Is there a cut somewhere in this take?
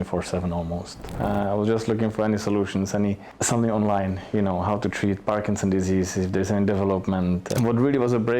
yes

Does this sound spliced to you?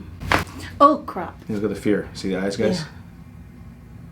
yes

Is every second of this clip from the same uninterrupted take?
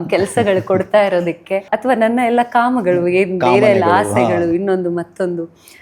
no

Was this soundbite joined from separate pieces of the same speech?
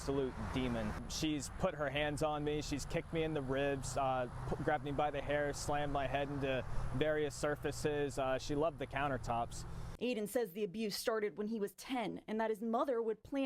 yes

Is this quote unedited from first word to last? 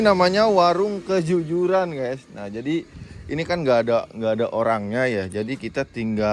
yes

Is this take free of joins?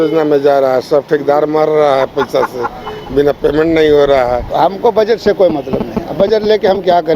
no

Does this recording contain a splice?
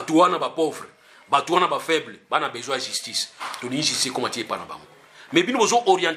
no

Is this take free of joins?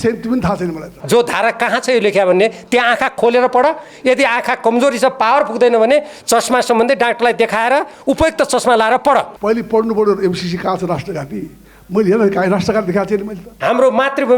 no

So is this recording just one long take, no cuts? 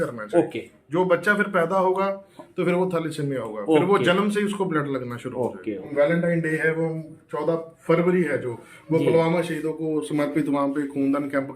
no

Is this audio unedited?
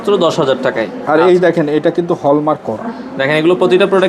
yes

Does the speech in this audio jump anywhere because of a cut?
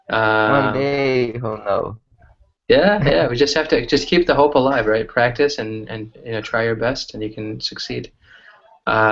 yes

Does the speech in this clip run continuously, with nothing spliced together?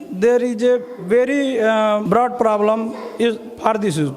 no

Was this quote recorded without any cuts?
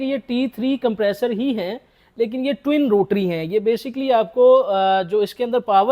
yes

